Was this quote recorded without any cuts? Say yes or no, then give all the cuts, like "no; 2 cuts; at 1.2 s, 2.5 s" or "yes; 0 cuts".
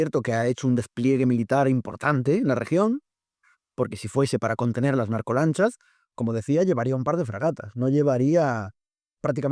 yes; 0 cuts